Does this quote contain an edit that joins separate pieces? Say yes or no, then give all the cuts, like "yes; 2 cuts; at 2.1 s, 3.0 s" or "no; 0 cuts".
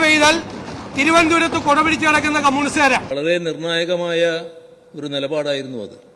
yes; 1 cut; at 3.1 s